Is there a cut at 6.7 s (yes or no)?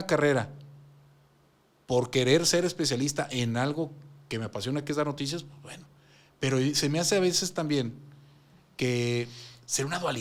no